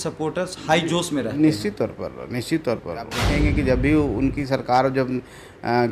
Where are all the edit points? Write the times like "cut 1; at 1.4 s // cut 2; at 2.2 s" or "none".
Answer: cut 1; at 3.2 s